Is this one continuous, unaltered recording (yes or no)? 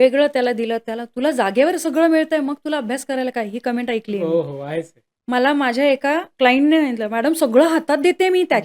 no